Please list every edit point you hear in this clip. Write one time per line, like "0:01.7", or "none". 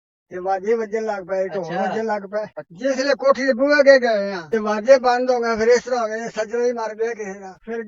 0:02.6